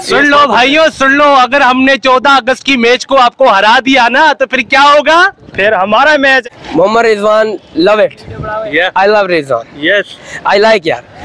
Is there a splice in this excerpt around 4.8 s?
no; 1 cut; at 6.4 s

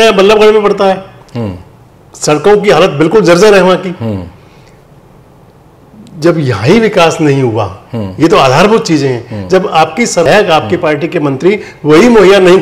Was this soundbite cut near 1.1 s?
no; 1 cut; at 10.3 s

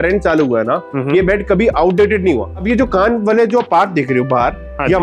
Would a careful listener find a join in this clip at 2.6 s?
yes; 1 cut; at 2.6 s

